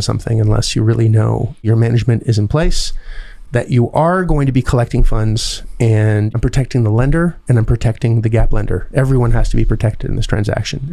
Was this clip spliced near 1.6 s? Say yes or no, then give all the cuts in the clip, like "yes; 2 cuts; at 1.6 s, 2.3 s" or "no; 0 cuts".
yes; 2 cuts; at 1.6 s, 6.3 s